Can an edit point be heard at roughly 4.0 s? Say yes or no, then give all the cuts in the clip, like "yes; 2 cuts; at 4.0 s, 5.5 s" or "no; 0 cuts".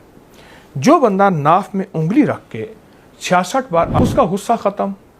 yes; 1 cut; at 4.0 s